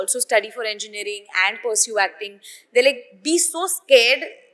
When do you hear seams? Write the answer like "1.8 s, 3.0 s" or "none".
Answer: none